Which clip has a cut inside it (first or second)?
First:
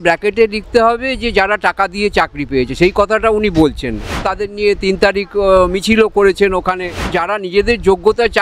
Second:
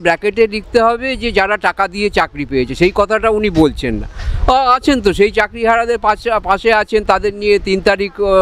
first